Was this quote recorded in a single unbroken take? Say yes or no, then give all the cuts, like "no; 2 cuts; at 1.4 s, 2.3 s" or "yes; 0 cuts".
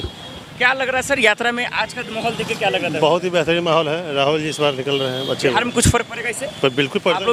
yes; 0 cuts